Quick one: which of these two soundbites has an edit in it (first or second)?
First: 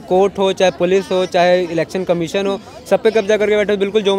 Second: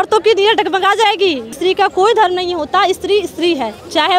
second